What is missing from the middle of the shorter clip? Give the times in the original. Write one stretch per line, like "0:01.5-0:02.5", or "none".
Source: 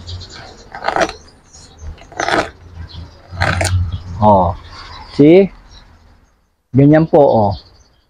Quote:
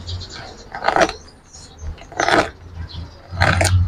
none